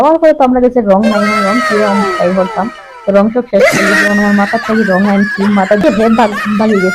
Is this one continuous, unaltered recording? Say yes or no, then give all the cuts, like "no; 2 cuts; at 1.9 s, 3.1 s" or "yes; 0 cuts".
no; 1 cut; at 5.8 s